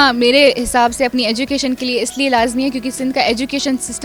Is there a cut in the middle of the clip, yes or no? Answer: no